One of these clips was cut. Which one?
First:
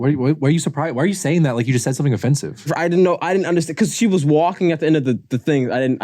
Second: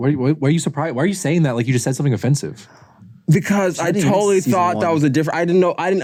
first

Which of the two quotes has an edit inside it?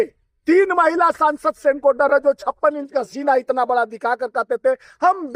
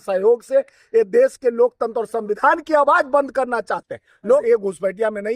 second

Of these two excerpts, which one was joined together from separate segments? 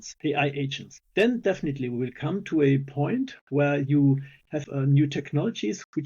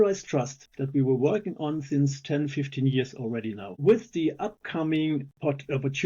first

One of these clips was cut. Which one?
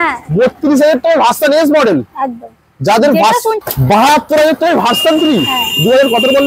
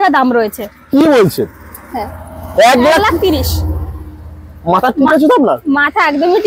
first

